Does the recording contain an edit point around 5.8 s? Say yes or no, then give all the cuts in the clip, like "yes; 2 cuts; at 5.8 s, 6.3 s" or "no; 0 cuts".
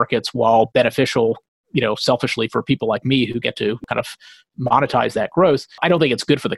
yes; 2 cuts; at 3.8 s, 5.8 s